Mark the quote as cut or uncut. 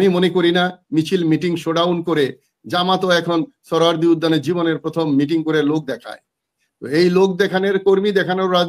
uncut